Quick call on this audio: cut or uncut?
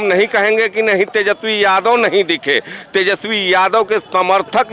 uncut